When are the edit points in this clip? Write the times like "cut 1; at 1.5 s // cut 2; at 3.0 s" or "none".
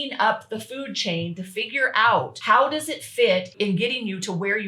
cut 1; at 2.3 s // cut 2; at 3.5 s